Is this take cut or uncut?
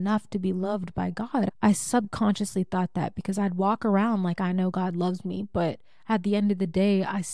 cut